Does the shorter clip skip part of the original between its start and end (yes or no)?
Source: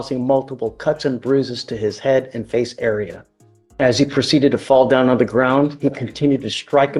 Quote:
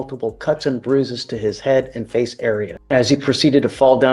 yes